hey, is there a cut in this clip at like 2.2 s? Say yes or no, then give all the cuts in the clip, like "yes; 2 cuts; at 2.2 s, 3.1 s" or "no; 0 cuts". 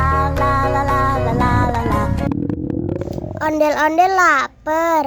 yes; 1 cut; at 2.2 s